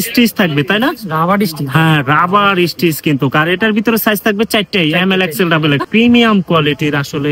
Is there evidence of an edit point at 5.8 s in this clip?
yes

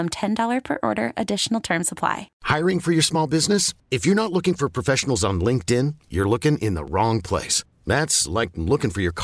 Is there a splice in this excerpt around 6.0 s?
no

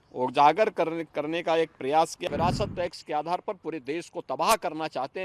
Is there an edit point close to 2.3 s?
yes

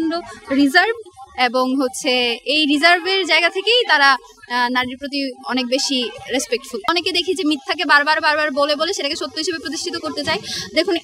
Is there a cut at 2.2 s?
no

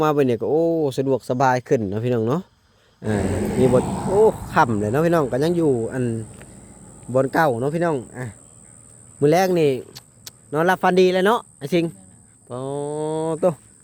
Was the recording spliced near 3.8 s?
yes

